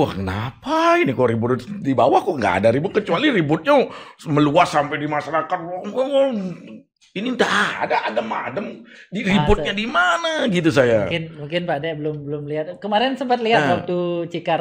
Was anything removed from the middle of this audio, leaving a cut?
no; 0 cuts

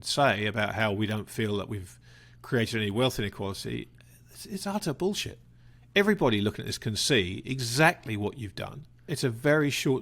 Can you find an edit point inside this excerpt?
yes; 1 cut; at 9.1 s

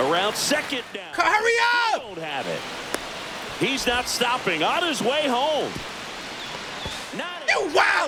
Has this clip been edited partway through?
no; 0 cuts

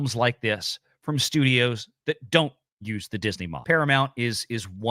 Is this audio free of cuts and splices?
no; 1 cut; at 3.5 s

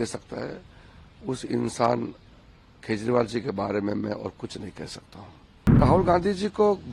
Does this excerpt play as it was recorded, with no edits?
no; 1 cut; at 5.8 s

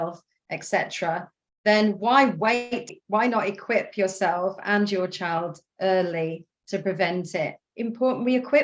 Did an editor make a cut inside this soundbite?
yes; 2 cuts; at 2.9 s, 7.6 s

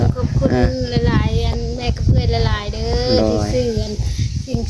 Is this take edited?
no; 0 cuts

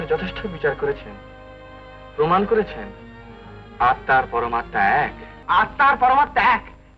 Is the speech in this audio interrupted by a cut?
yes; 1 cut; at 5.3 s

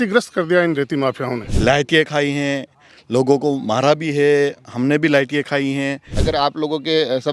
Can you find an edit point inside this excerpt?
yes; 2 cuts; at 1.4 s, 6.1 s

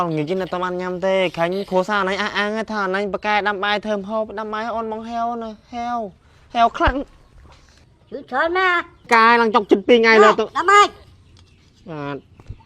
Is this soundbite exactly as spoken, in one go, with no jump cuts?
no; 1 cut; at 9.1 s

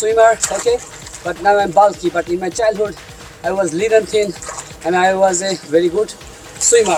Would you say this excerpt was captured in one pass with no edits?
yes; 0 cuts

